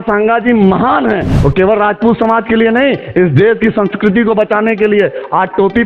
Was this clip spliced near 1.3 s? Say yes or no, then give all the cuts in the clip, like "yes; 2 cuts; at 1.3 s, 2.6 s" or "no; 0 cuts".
yes; 1 cut; at 1.3 s